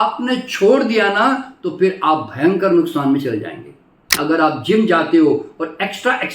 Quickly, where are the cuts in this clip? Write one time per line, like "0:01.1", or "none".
0:04.2